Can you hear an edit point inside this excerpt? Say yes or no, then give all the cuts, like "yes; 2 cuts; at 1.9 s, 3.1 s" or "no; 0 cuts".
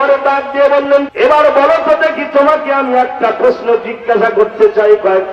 yes; 1 cut; at 1.1 s